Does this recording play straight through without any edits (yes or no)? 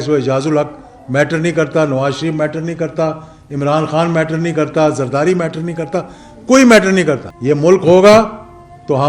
no